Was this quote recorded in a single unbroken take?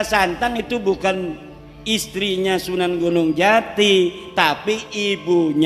yes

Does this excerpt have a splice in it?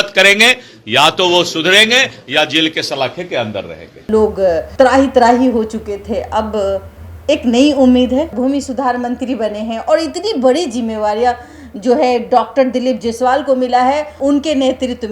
yes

